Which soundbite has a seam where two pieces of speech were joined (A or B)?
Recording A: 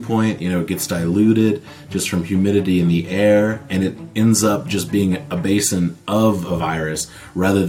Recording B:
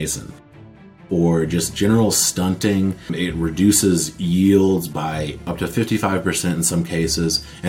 B